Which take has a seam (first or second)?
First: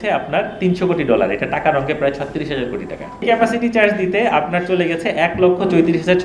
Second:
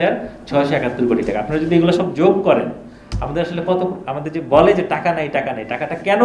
first